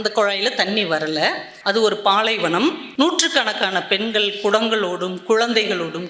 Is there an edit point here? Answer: yes; 2 cuts; at 1.5 s, 2.8 s

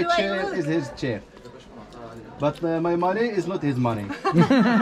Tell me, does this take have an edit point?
no; 0 cuts

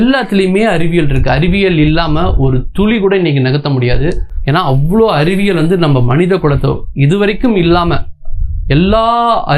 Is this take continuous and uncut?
yes; 0 cuts

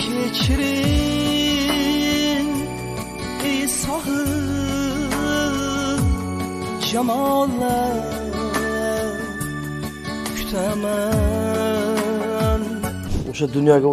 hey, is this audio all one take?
no; 1 cut; at 13.0 s

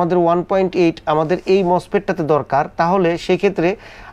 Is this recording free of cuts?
yes; 0 cuts

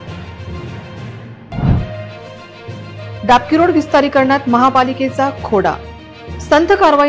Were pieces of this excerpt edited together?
yes; 1 cut; at 0.9 s

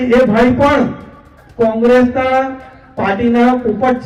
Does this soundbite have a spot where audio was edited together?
no; 0 cuts

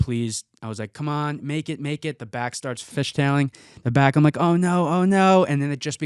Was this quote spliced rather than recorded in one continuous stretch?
yes; 1 cut; at 2.9 s

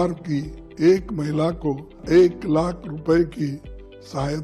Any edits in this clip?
yes; 1 cut; at 2.0 s

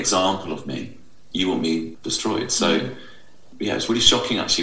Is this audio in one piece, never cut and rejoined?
no; 3 cuts; at 1.2 s, 1.9 s, 3.5 s

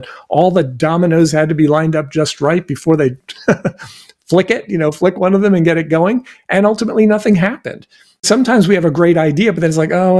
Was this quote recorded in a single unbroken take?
no; 1 cut; at 8.3 s

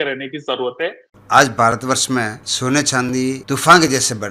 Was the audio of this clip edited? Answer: yes; 3 cuts; at 1.1 s, 2.4 s, 3.4 s

